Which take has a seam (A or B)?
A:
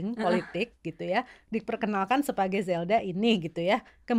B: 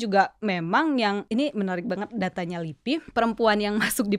B